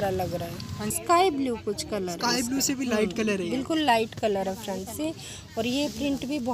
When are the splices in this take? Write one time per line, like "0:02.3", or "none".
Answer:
0:00.9